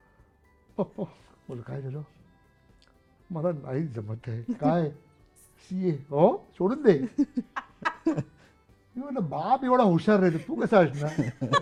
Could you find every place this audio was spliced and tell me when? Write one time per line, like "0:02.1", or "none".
none